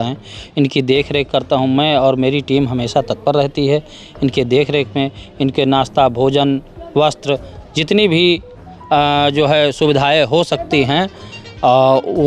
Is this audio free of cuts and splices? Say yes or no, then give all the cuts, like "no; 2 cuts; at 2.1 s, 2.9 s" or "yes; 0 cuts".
yes; 0 cuts